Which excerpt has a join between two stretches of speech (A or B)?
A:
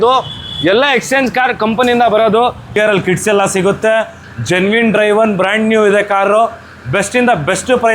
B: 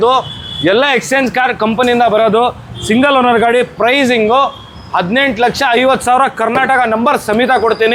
A